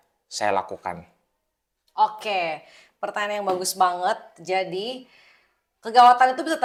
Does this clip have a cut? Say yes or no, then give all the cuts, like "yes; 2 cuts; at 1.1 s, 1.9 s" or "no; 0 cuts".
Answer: no; 0 cuts